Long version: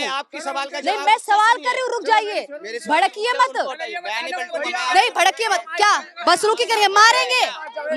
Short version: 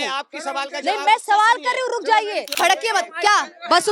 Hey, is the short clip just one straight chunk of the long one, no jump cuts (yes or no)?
no